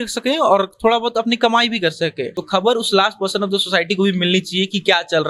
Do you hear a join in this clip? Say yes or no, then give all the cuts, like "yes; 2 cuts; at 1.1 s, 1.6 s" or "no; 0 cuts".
yes; 1 cut; at 2.3 s